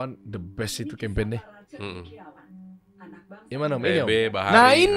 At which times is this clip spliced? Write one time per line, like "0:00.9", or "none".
none